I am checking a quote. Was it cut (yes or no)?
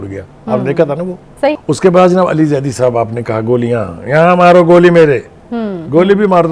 yes